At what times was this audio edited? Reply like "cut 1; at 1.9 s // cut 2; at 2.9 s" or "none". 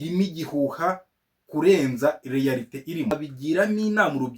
cut 1; at 3.1 s